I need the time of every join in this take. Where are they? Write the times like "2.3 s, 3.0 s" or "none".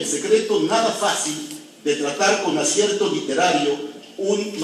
2.4 s